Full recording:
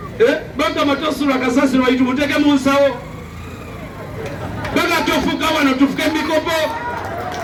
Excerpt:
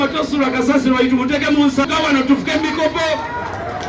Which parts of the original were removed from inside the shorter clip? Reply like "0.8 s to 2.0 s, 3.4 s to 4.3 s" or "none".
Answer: 2.7 s to 5.4 s